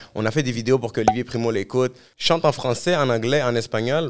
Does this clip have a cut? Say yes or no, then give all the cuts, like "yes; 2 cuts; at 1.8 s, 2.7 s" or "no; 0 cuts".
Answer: yes; 1 cut; at 2.1 s